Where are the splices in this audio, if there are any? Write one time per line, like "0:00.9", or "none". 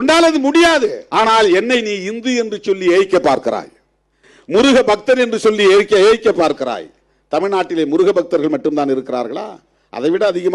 0:01.0